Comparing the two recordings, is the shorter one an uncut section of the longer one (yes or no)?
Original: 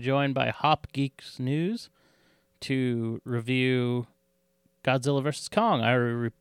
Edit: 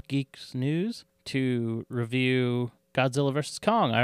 no